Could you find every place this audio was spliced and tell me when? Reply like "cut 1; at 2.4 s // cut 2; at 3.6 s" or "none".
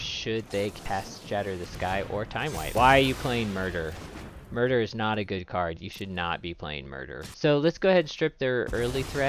cut 1; at 2.7 s // cut 2; at 7.3 s